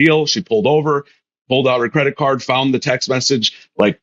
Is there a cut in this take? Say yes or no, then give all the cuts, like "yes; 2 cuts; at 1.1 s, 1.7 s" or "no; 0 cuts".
no; 0 cuts